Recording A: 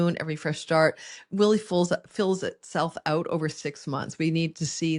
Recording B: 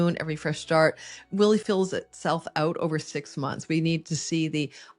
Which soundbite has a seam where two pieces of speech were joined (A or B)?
B